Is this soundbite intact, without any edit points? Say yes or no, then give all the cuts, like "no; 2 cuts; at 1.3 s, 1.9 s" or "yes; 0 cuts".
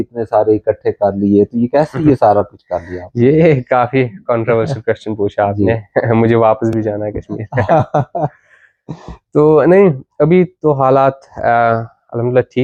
yes; 0 cuts